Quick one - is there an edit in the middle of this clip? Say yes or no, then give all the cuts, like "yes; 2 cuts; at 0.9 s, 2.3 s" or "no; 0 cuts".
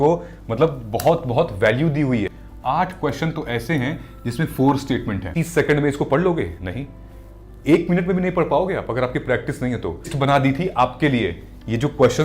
yes; 3 cuts; at 2.4 s, 5.2 s, 10.1 s